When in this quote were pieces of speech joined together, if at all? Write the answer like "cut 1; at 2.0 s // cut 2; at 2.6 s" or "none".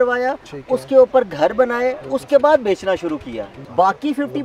cut 1; at 3.5 s